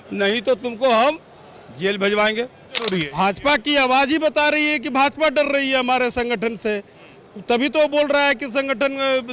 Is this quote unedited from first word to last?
no; 1 cut; at 2.9 s

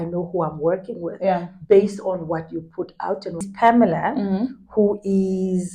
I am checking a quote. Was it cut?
yes; 1 cut; at 3.5 s

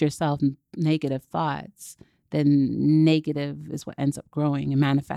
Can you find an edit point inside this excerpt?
no; 0 cuts

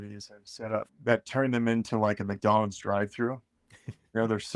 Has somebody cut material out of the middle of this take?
yes; 1 cut; at 0.9 s

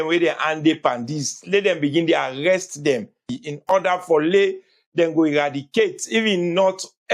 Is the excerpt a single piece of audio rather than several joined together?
no; 1 cut; at 3.3 s

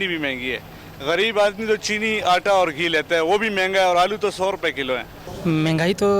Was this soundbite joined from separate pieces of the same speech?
yes; 1 cut; at 5.2 s

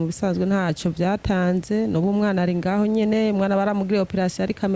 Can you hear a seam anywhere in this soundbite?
no; 0 cuts

